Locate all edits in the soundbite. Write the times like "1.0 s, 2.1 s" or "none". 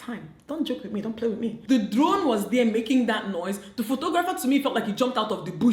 1.6 s